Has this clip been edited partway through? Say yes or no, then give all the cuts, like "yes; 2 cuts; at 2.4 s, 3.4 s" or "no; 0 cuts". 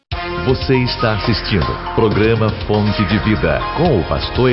no; 0 cuts